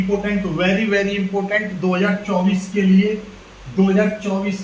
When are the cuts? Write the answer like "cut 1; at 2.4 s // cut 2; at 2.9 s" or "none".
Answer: none